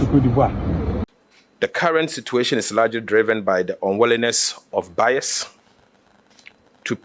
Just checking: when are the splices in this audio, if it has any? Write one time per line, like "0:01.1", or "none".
0:01.1